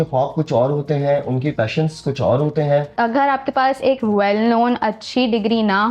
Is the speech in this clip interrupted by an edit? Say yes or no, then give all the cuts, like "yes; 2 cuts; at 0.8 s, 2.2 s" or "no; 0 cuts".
yes; 2 cuts; at 1.5 s, 2.9 s